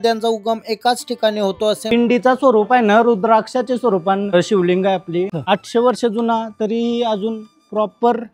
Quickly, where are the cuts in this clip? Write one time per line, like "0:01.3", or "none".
0:01.9
0:05.4